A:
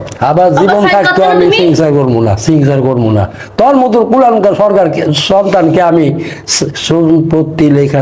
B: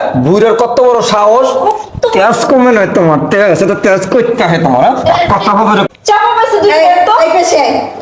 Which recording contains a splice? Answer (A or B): B